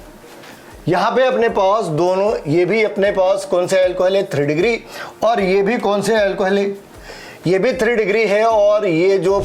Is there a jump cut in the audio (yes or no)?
no